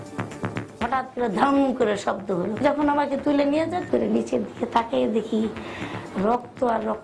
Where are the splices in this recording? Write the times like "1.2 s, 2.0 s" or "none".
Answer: 0.8 s, 2.5 s